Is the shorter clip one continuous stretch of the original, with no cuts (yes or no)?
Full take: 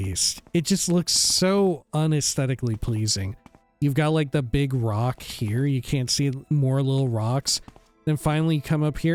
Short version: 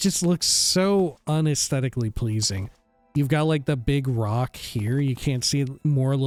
yes